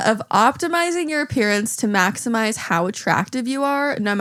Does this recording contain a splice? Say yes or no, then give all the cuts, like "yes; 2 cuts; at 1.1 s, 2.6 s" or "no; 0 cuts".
no; 0 cuts